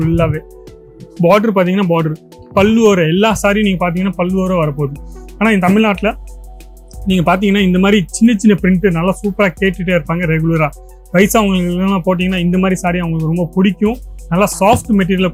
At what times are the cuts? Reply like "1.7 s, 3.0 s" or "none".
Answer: none